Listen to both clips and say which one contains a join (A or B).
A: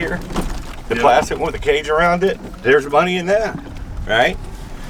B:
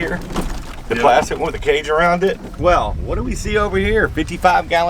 B